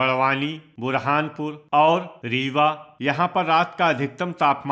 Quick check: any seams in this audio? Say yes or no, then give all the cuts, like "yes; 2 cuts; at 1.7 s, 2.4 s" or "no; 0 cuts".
yes; 2 cuts; at 1.6 s, 2.5 s